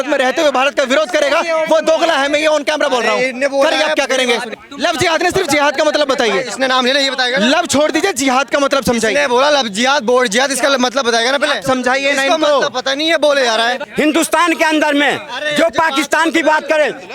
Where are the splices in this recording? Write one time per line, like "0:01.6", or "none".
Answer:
0:04.6
0:13.8